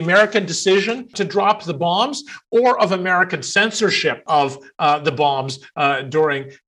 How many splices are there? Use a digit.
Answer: 2